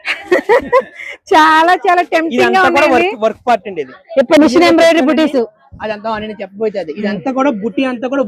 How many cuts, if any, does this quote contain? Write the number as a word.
one